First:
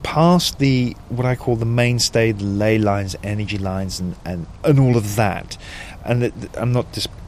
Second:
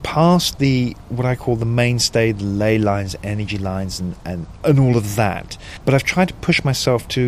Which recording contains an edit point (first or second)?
second